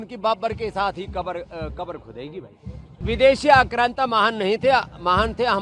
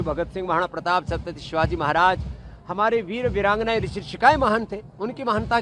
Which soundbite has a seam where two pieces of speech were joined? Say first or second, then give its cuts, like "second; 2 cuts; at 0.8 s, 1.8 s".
first; 1 cut; at 3.0 s